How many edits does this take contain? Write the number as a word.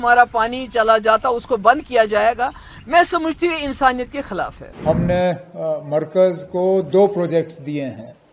one